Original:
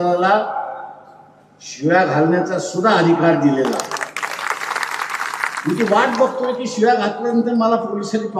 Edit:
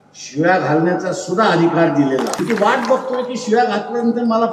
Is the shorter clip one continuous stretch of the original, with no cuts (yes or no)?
no